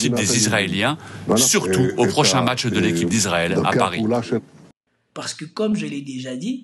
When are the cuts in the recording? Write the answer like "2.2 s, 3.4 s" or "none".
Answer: 4.6 s

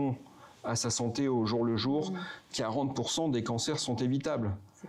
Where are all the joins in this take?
none

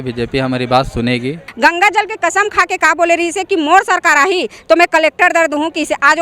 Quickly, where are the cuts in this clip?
1.4 s

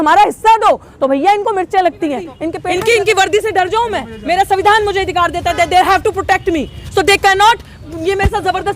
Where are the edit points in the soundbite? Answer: 2.5 s

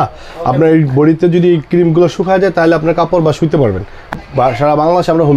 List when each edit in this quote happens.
4.2 s

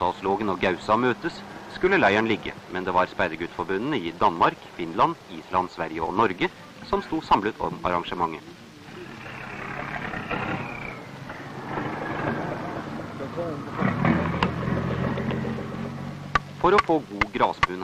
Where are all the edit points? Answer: 15.8 s

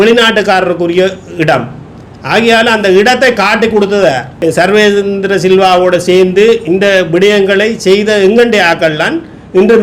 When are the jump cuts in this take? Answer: 4.3 s

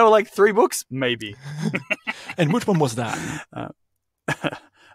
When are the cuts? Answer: none

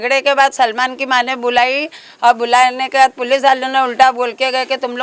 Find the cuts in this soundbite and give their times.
none

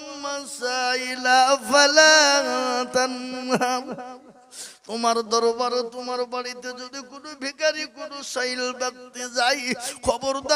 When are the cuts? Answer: none

